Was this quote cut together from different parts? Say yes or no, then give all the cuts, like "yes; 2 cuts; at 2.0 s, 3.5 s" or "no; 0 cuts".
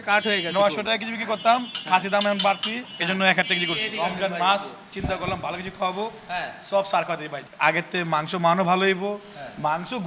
yes; 2 cuts; at 3.9 s, 7.4 s